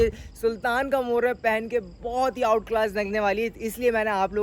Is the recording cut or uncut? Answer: uncut